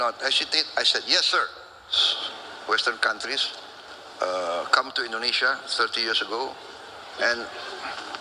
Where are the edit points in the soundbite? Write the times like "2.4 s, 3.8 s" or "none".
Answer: 2.0 s